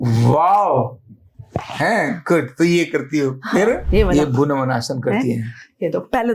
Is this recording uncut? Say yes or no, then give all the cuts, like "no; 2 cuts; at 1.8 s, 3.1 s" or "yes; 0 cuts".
no; 1 cut; at 3.8 s